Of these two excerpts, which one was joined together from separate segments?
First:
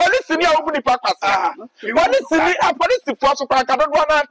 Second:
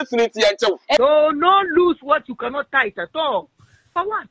second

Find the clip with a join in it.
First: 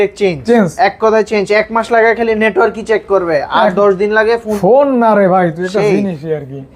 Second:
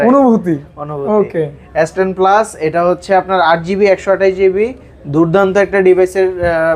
first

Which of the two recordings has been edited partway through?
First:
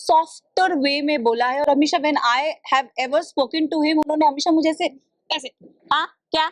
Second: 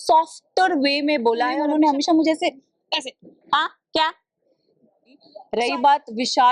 second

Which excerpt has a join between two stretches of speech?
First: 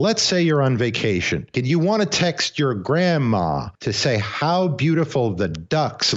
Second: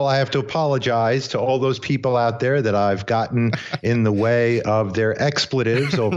first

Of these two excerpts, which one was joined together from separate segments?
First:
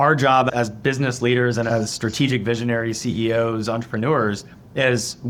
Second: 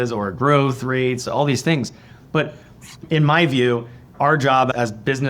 second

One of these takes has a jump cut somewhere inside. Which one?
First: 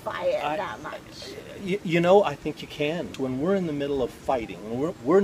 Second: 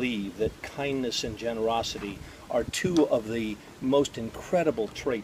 first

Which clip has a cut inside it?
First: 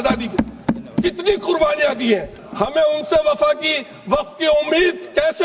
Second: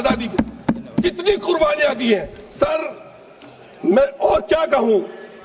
first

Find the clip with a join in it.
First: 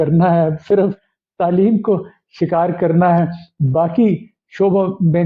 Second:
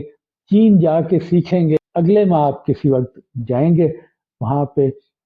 second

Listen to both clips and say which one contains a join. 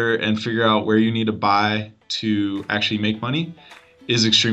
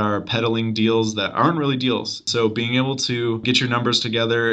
second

